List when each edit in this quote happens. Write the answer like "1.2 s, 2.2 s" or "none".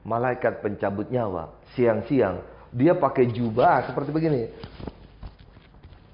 none